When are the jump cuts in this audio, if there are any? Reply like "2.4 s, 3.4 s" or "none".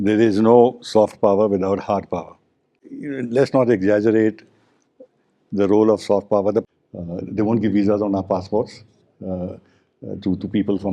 6.6 s